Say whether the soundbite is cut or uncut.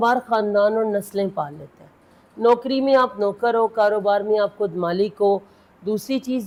uncut